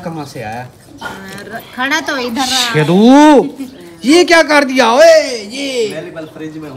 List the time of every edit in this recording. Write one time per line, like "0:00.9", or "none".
none